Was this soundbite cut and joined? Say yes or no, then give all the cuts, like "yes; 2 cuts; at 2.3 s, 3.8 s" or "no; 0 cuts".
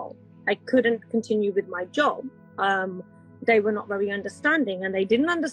no; 0 cuts